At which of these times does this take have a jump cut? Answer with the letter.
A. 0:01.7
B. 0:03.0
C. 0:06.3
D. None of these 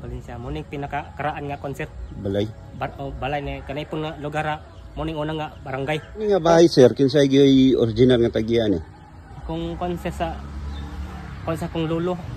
C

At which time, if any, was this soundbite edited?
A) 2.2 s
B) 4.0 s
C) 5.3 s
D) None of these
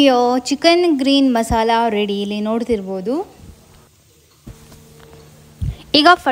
D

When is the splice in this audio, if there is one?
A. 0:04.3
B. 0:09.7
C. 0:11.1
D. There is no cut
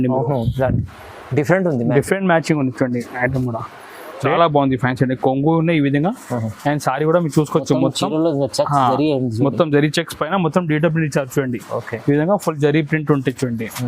A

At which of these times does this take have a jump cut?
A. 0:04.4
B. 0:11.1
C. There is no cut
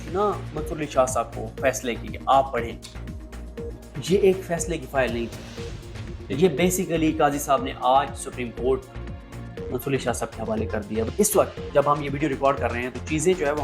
B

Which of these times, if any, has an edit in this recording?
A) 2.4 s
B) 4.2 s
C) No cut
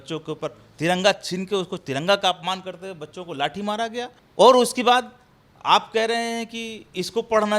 B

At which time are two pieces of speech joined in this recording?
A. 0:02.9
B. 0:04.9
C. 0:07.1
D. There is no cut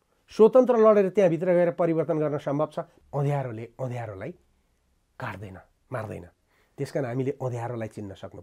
A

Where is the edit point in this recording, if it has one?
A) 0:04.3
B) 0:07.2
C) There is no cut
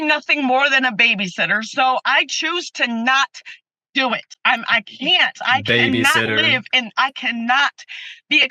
C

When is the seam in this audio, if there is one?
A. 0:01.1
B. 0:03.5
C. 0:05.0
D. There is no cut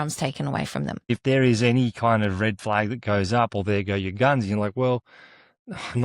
A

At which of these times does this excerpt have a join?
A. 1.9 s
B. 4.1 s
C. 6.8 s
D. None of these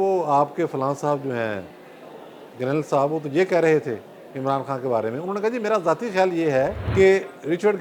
C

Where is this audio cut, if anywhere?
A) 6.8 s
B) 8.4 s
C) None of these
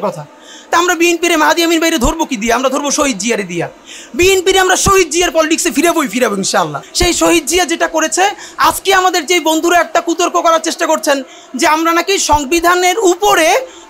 A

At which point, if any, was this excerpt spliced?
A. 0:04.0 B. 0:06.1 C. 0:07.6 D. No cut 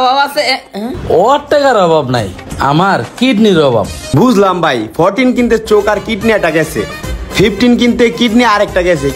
A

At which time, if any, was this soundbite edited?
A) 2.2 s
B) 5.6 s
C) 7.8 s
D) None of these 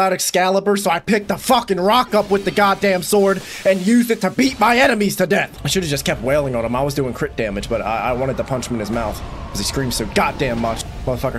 B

